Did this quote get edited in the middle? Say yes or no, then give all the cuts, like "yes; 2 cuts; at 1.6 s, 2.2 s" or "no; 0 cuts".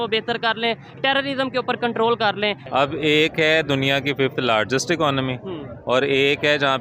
yes; 1 cut; at 2.6 s